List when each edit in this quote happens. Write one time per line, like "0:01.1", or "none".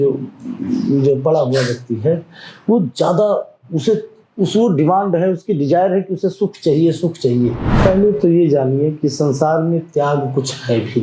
0:07.7